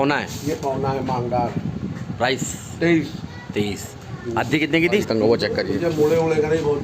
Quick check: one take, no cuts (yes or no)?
no